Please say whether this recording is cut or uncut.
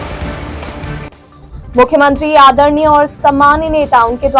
cut